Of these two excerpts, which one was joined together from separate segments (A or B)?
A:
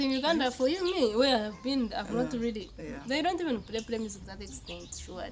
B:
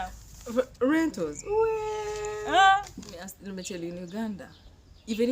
B